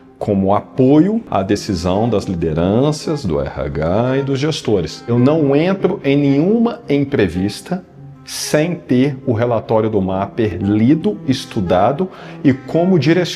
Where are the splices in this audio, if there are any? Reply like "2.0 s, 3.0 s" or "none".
5.0 s